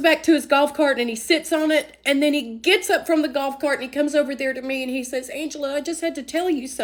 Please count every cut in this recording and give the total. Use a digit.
0